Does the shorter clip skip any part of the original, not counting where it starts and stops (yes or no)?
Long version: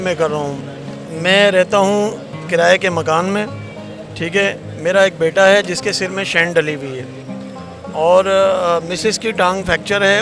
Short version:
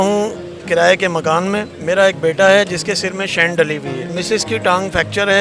yes